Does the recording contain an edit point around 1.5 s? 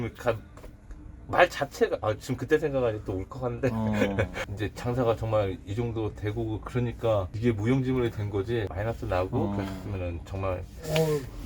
no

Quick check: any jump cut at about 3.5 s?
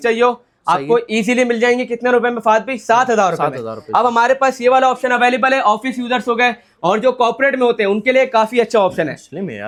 no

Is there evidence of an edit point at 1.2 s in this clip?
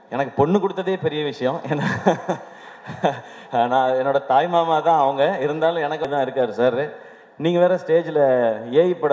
no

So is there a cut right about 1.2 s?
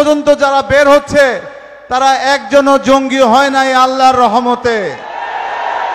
no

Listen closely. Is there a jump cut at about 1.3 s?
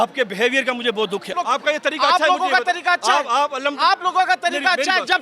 yes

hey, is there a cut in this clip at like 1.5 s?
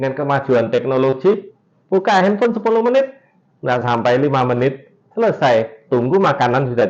no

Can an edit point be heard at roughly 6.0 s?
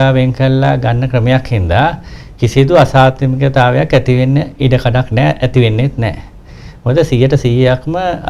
no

